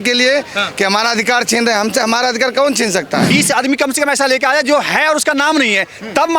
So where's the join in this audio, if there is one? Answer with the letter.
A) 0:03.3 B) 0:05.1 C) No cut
A